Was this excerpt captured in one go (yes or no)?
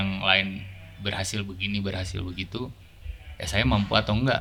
yes